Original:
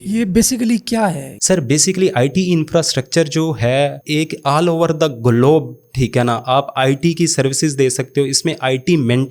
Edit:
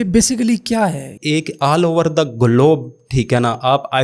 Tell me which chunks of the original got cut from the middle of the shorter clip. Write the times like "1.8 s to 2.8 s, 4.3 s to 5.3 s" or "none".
1.4 s to 4.0 s